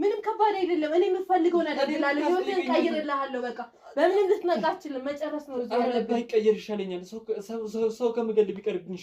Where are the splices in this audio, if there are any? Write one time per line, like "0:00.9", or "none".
none